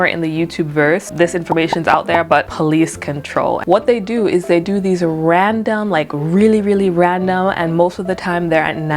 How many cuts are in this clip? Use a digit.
3